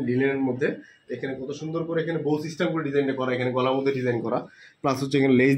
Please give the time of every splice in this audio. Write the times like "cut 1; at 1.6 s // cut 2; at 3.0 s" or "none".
none